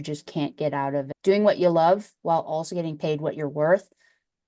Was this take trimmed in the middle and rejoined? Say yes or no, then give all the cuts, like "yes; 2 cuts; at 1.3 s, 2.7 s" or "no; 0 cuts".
yes; 1 cut; at 1.1 s